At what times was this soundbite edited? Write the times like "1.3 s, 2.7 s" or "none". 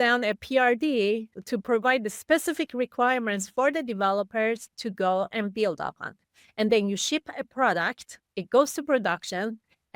none